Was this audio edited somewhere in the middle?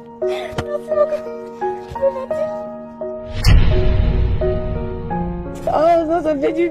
no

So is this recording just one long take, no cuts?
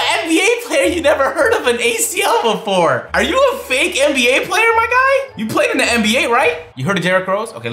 yes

